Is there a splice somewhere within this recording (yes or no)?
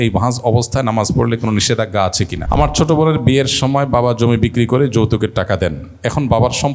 yes